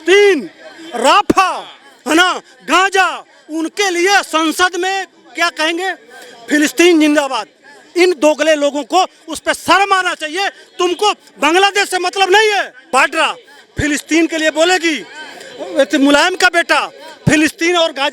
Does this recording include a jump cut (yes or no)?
yes